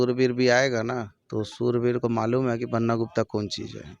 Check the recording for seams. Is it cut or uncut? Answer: cut